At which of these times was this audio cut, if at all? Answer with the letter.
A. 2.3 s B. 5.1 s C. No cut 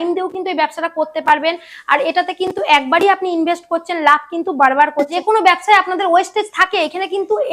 B